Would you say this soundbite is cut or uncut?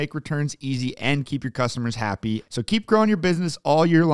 cut